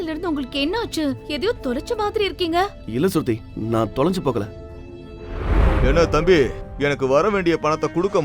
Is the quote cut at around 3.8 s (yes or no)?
no